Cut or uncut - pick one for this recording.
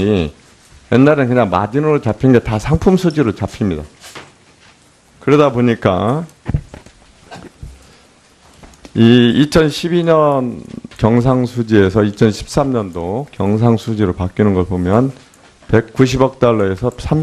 cut